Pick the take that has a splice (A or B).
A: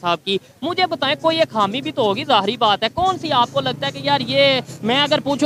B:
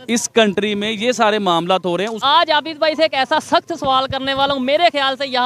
B